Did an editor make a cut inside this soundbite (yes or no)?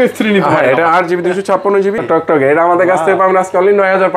yes